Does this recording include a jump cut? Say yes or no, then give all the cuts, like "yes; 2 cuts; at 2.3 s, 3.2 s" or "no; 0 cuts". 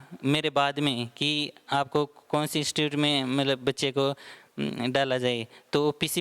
no; 0 cuts